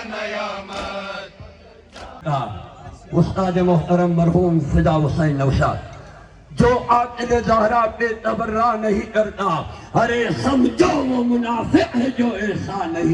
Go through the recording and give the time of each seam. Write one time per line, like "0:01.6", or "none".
0:02.2